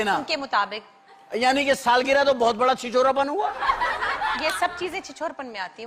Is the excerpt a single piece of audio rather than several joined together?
yes; 0 cuts

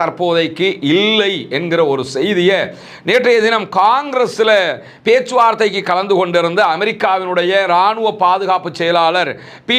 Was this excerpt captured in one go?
yes; 0 cuts

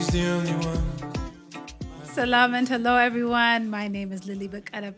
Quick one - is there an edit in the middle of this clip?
yes; 1 cut; at 2.0 s

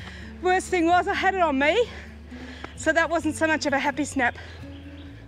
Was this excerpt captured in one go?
yes; 0 cuts

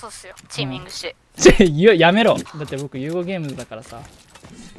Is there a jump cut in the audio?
yes; 2 cuts; at 1.2 s, 2.5 s

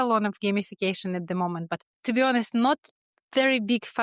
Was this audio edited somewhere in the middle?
yes; 1 cut; at 1.8 s

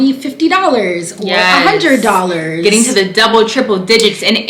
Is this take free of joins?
yes; 0 cuts

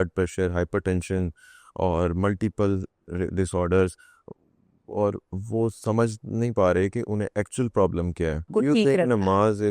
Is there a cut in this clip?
yes; 1 cut; at 8.5 s

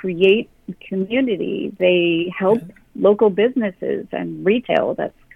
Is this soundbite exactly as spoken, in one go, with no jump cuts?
yes; 0 cuts

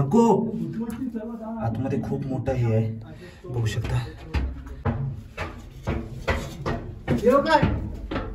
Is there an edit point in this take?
yes; 1 cut; at 4.7 s

